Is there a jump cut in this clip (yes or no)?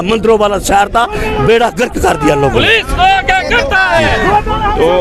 no